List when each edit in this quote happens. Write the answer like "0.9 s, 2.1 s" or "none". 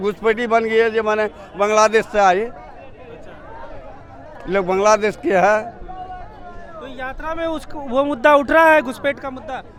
none